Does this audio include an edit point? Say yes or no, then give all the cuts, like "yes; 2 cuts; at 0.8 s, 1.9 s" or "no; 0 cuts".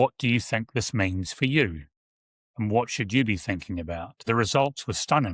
yes; 1 cut; at 4.2 s